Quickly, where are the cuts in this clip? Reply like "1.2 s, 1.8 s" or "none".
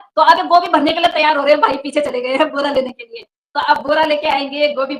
none